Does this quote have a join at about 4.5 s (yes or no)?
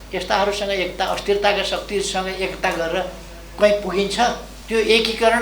yes